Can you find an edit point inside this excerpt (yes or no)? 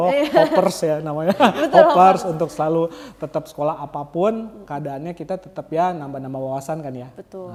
no